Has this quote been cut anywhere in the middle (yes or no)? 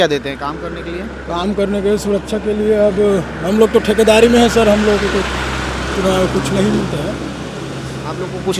no